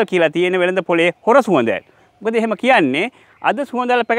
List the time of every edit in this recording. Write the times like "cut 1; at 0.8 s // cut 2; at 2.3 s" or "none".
none